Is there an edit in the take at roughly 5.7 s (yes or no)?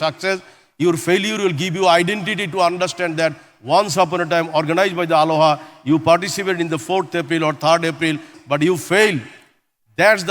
no